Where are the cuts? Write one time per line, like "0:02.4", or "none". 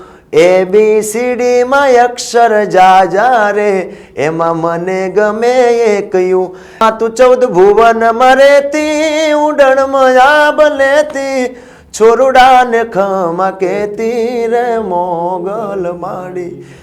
0:06.8